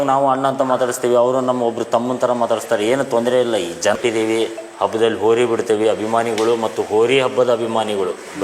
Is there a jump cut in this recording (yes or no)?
yes